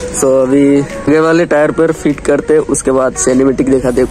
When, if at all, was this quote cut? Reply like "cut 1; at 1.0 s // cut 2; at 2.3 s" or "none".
cut 1; at 1.0 s